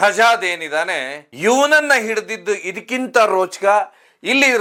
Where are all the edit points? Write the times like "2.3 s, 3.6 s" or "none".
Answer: none